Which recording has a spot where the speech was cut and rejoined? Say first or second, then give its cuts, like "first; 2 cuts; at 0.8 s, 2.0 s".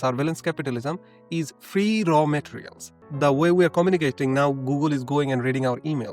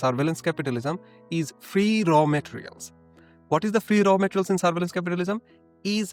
first; 1 cut; at 3.0 s